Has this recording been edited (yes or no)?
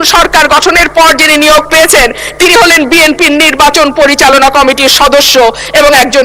no